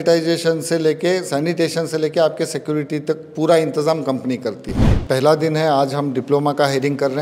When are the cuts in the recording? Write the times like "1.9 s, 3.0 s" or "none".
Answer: 4.9 s